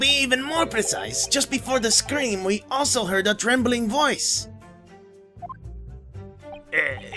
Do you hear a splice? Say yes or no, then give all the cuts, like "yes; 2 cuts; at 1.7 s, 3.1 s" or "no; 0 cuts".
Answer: yes; 1 cut; at 3.9 s